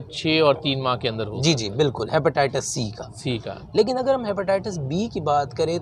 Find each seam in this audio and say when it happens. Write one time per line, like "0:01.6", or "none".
none